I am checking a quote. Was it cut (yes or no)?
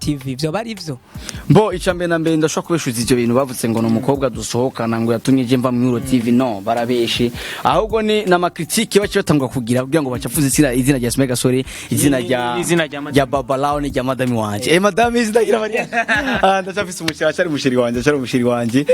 no